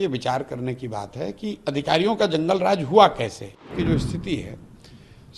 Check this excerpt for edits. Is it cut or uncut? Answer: cut